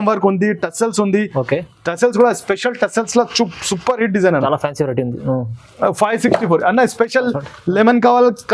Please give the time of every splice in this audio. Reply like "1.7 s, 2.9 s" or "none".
none